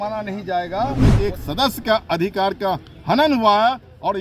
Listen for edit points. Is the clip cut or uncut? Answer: cut